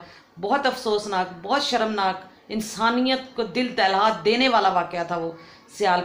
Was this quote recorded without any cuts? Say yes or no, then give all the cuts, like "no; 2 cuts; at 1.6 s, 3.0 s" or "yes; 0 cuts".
yes; 0 cuts